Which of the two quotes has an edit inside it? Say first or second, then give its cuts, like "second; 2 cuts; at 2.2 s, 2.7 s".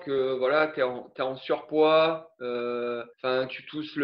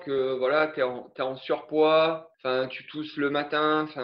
second; 1 cut; at 2.3 s